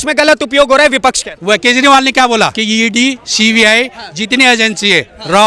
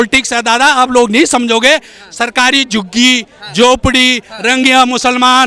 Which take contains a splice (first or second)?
first